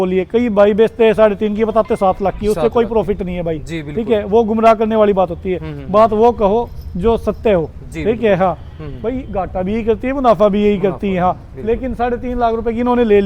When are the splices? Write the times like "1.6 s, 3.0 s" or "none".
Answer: none